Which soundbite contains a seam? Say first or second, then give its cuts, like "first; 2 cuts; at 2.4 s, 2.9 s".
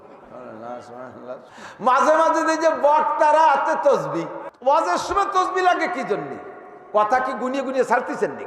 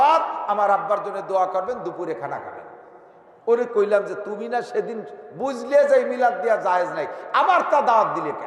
first; 2 cuts; at 1.5 s, 4.4 s